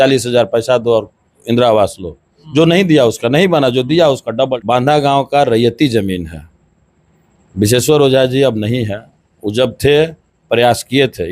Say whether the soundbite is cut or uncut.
cut